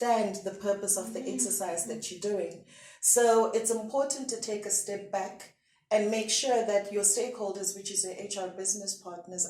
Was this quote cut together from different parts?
no; 0 cuts

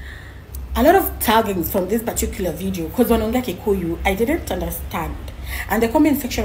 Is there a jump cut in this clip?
no; 0 cuts

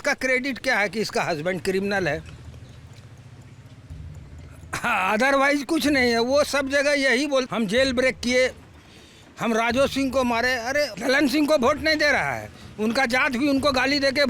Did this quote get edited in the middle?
yes; 2 cuts; at 7.5 s, 10.9 s

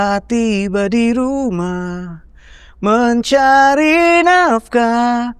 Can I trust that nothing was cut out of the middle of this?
yes; 0 cuts

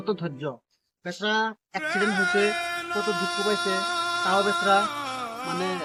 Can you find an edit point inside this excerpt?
no; 0 cuts

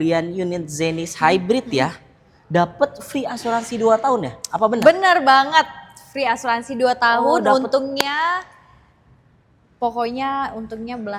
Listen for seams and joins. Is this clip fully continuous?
yes; 0 cuts

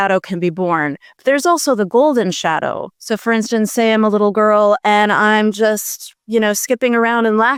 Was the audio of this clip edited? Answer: no; 0 cuts

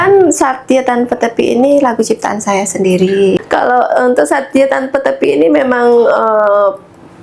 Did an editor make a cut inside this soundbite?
yes; 1 cut; at 3.4 s

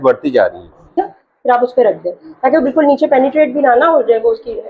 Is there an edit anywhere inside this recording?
yes; 1 cut; at 1.0 s

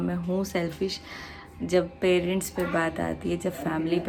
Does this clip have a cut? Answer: no; 0 cuts

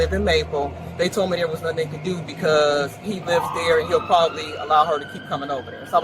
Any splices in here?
no; 0 cuts

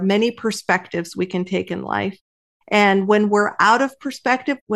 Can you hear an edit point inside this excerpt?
no; 0 cuts

